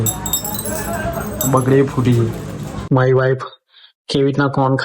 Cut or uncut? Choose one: cut